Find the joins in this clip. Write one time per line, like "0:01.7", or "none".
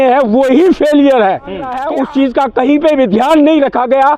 0:01.8